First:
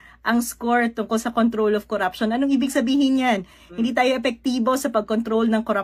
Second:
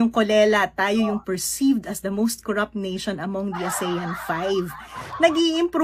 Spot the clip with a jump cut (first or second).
second